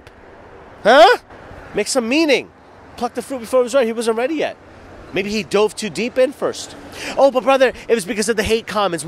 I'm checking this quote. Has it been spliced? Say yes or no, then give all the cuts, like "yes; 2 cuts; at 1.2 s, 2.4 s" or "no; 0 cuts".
no; 0 cuts